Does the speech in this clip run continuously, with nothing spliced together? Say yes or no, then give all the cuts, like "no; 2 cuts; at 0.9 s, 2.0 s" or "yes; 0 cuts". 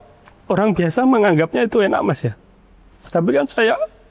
yes; 0 cuts